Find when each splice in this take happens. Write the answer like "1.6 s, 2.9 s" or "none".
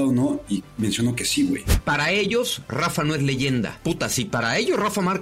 1.7 s, 3.8 s